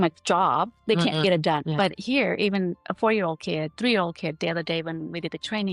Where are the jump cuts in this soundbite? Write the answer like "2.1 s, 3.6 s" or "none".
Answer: 1.7 s